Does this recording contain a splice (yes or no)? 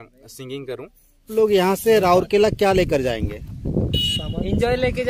yes